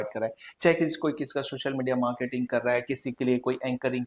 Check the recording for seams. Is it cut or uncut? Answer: uncut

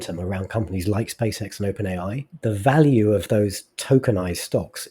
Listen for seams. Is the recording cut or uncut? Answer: cut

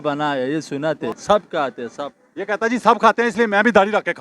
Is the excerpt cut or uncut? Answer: cut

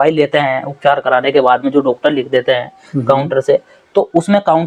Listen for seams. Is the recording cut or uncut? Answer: uncut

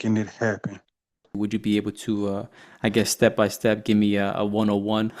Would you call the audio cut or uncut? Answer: cut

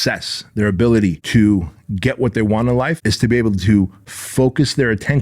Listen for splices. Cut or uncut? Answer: cut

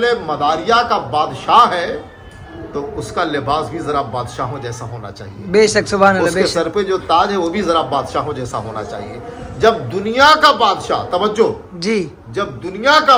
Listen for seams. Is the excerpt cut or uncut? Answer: uncut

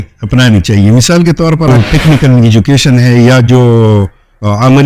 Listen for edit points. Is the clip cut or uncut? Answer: cut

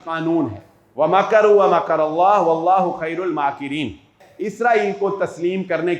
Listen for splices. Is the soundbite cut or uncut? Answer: cut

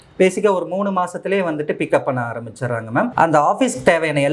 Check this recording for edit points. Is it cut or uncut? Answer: cut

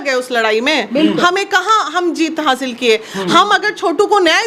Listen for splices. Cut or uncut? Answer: uncut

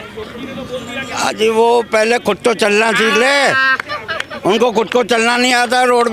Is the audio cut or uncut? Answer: uncut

